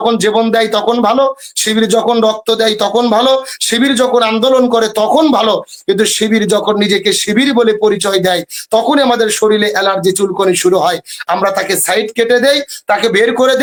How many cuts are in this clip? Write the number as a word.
zero